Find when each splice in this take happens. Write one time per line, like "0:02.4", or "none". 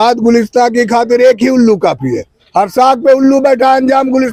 none

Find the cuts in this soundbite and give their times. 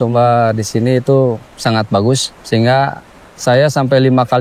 0:01.5
0:02.3

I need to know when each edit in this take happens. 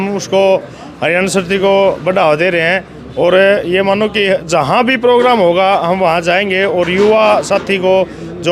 none

